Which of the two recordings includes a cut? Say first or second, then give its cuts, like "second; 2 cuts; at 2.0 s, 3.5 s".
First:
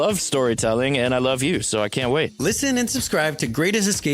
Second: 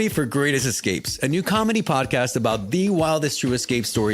first; 1 cut; at 2.3 s